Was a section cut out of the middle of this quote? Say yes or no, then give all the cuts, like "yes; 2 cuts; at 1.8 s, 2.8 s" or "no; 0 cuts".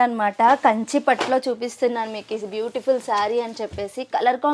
no; 0 cuts